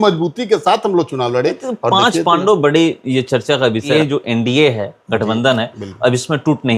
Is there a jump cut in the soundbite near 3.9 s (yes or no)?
yes